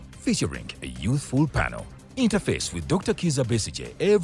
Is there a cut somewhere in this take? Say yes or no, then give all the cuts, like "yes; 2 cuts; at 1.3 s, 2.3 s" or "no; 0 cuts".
no; 0 cuts